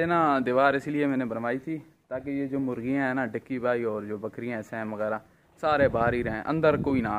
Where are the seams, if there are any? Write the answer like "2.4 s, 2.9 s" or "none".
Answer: none